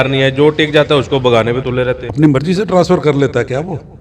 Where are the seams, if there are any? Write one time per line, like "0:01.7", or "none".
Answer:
0:02.1